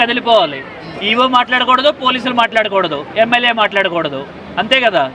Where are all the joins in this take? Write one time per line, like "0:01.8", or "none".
none